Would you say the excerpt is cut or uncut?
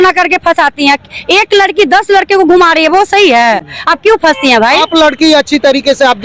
uncut